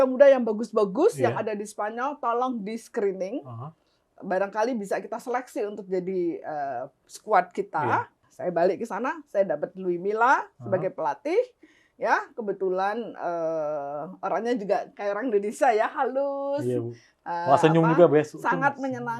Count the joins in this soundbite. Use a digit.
1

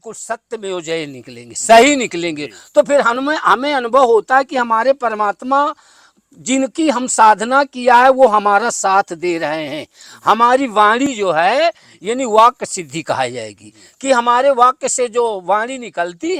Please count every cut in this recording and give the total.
0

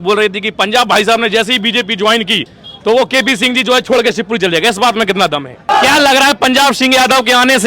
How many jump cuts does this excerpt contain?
1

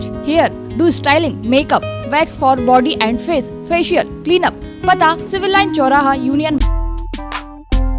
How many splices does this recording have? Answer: 1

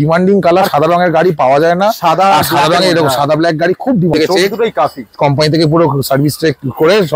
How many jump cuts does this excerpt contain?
1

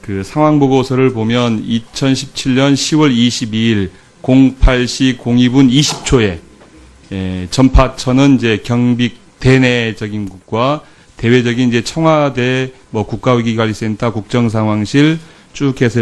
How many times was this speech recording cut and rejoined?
1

